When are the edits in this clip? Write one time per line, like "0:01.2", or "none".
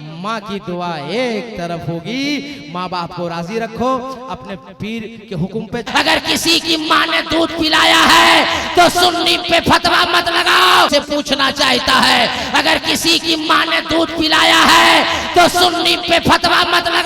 0:05.9
0:10.9